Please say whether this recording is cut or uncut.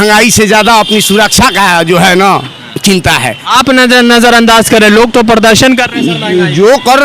cut